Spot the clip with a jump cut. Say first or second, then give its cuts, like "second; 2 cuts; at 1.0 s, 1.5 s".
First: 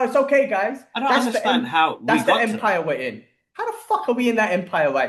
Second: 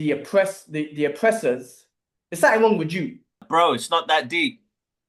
second; 1 cut; at 3.3 s